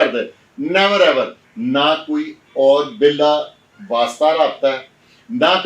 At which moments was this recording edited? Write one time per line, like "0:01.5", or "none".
0:01.4

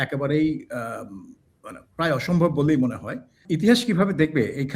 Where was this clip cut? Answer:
0:03.4

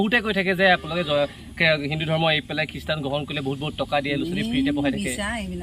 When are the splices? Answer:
none

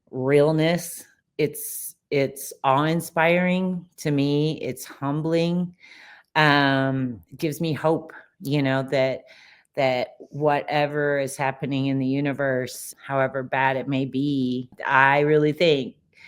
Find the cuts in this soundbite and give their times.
0:12.9
0:14.7

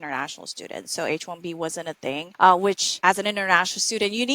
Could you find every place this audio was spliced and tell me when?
0:02.3
0:02.9

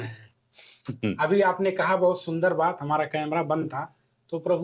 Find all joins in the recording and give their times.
none

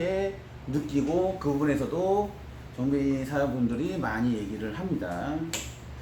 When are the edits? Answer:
none

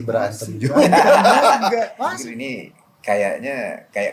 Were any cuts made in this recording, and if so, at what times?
0:02.0

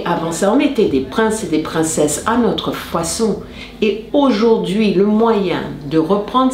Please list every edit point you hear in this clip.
0:03.6

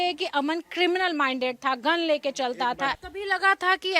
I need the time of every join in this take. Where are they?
0:03.0

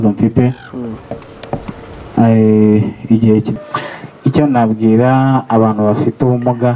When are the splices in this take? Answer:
0:03.5

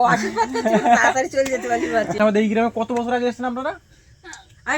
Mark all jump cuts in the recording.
0:02.1

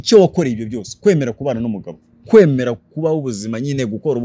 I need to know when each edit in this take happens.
none

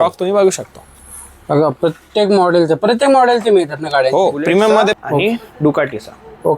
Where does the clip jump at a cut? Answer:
0:05.0

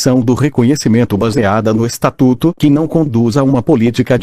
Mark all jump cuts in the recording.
none

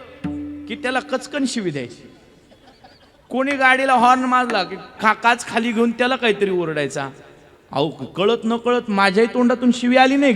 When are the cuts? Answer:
0:04.9

